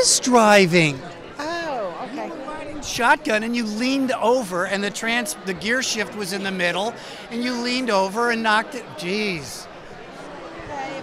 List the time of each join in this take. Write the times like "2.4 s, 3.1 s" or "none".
none